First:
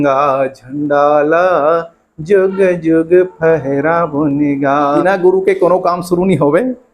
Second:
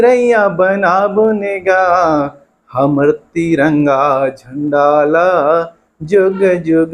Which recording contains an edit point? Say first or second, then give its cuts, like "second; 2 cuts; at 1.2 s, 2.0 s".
first; 1 cut; at 5.0 s